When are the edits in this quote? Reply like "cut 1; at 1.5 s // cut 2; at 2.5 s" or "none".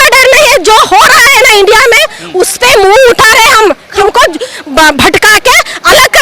cut 1; at 4.0 s